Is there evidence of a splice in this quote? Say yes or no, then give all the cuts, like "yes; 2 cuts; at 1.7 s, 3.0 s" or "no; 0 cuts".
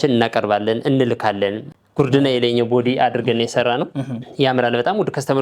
yes; 1 cut; at 1.6 s